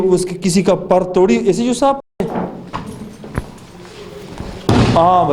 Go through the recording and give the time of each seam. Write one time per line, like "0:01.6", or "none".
0:02.3